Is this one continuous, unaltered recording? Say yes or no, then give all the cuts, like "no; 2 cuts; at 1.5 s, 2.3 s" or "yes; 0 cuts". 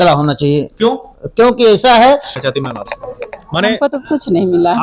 no; 1 cut; at 2.3 s